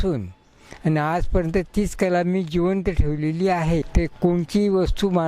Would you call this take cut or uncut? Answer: cut